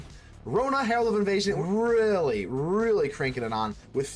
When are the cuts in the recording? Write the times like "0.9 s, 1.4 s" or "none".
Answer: 1.6 s